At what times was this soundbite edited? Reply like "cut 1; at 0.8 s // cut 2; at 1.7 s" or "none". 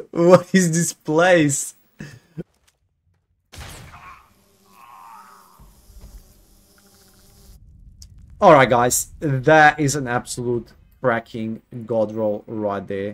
cut 1; at 2.5 s

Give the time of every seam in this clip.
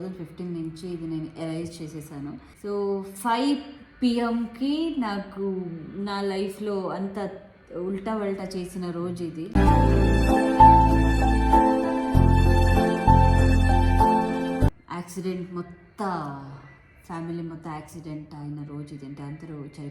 cut 1; at 2.5 s // cut 2; at 14.7 s

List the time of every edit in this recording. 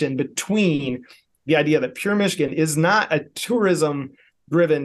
cut 1; at 3.3 s

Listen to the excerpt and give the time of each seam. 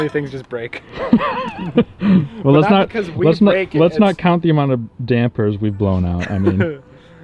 none

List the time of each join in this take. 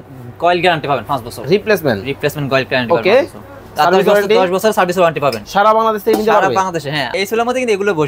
cut 1; at 7.1 s

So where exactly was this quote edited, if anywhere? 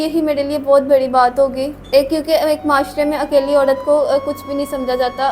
cut 1; at 1.8 s

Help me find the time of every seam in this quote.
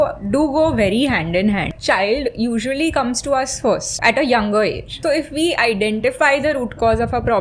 cut 1; at 1.7 s // cut 2; at 3.9 s // cut 3; at 4.9 s

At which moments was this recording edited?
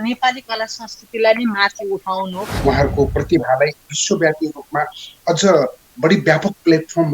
cut 1; at 2.5 s

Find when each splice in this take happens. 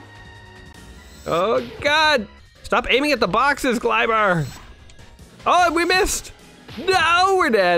cut 1; at 2.4 s

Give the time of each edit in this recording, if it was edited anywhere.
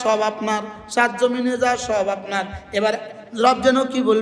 none

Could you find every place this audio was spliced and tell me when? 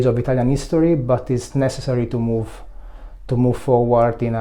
none

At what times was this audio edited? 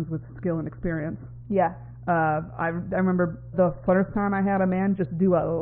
cut 1; at 3.5 s

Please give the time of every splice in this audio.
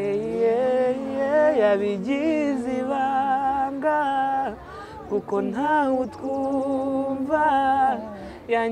none

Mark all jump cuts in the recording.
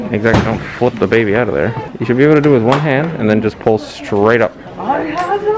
cut 1; at 1.8 s

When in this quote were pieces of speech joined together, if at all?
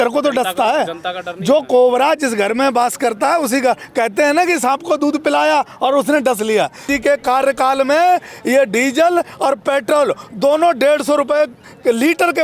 cut 1; at 6.9 s

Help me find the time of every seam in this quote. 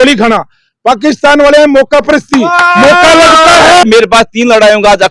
cut 1; at 3.8 s

